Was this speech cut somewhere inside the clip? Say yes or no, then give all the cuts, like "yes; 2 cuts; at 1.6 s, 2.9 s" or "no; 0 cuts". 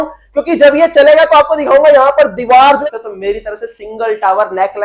yes; 1 cut; at 2.8 s